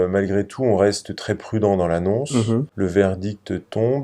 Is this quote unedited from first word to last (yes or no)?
no